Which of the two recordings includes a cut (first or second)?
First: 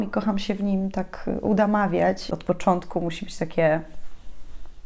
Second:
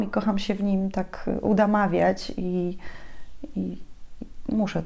first